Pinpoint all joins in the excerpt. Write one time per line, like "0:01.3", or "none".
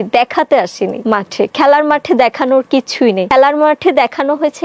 0:01.0
0:03.3